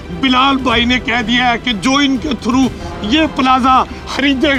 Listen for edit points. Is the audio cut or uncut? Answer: uncut